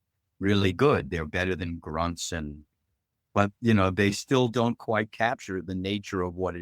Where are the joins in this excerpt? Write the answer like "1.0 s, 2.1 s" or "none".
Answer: 3.1 s

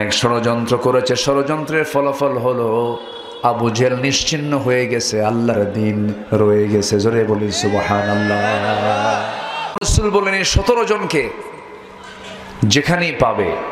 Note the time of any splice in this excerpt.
9.8 s

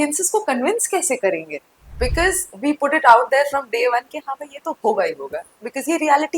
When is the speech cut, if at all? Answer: 2.0 s

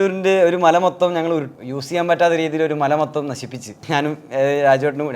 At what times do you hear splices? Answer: 1.5 s, 3.8 s

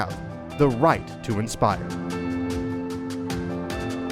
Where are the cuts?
1.8 s

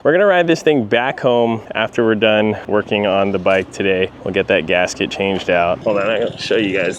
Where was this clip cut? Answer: 5.8 s

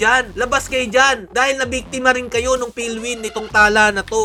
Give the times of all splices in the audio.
none

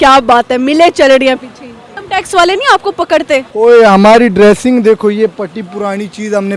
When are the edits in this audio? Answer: 1.9 s, 3.5 s

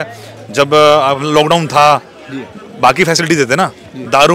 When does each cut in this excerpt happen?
none

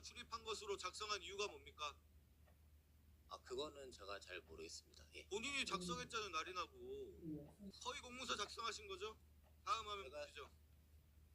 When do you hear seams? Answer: 7.7 s

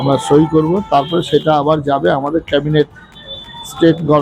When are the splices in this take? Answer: none

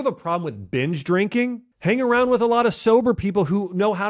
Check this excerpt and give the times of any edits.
1.7 s

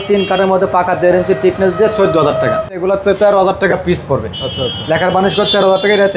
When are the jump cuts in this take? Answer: 2.8 s

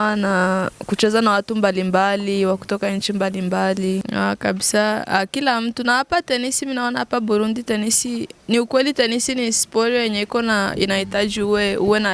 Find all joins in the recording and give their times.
4.1 s

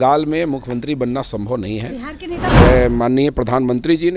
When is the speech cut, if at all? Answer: 2.5 s

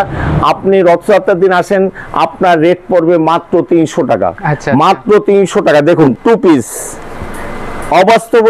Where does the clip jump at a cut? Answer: 6.0 s

